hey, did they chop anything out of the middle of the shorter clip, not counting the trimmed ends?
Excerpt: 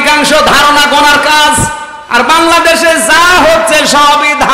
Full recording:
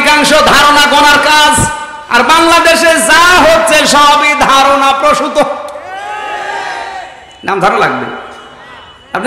no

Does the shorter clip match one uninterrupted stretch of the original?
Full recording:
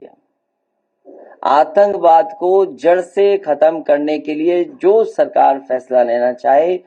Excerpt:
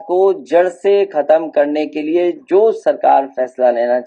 yes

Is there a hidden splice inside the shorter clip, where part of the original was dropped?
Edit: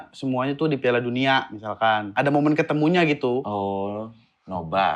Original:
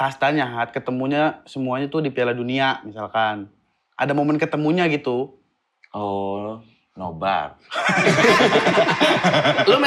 yes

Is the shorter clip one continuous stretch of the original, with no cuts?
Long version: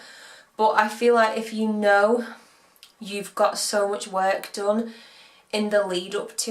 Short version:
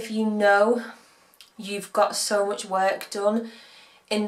yes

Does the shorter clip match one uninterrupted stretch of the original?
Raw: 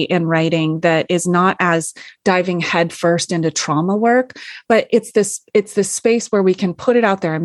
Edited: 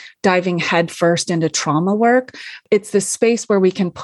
no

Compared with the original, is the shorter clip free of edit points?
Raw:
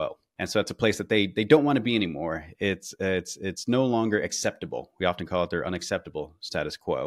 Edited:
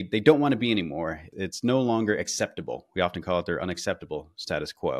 no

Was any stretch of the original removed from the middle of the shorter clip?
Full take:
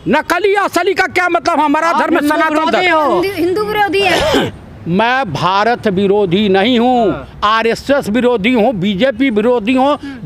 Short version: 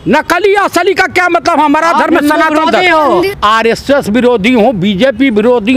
yes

